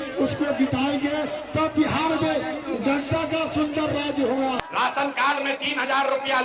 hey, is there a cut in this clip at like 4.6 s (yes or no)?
yes